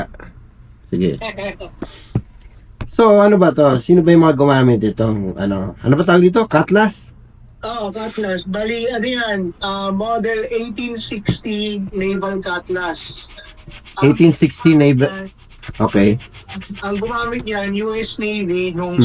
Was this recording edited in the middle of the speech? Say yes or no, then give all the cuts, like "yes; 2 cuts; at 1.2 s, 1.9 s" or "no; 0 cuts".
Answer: no; 0 cuts